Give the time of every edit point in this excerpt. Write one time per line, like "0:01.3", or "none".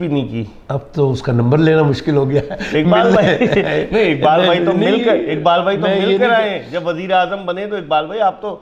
none